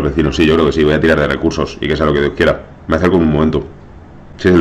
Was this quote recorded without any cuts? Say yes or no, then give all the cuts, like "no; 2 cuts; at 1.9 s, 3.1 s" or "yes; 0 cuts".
yes; 0 cuts